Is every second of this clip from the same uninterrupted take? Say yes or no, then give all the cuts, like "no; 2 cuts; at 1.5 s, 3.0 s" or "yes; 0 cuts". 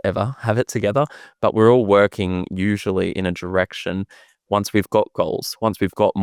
yes; 0 cuts